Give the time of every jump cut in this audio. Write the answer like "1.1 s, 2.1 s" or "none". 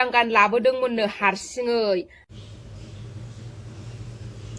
2.2 s